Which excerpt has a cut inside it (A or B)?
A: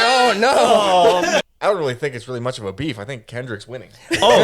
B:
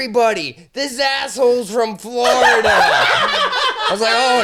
A